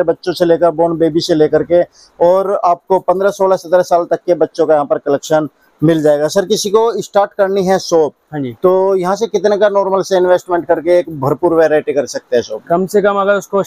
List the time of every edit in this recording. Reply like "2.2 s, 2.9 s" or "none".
none